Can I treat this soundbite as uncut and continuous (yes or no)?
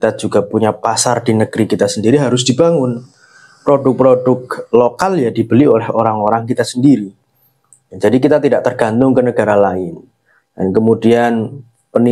yes